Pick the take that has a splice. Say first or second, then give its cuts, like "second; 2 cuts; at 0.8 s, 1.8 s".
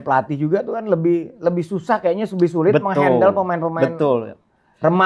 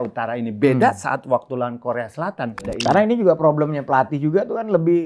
second; 1 cut; at 2.6 s